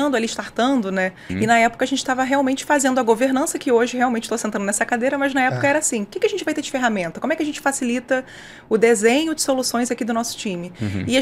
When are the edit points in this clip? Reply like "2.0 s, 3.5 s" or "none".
1.2 s